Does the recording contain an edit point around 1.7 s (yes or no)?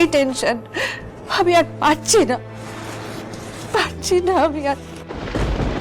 no